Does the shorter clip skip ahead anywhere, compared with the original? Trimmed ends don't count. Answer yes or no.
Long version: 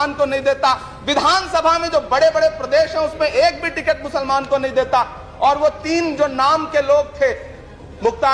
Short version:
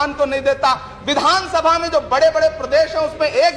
no